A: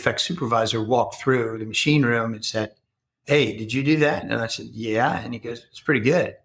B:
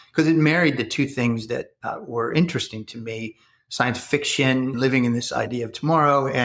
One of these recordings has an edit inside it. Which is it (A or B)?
B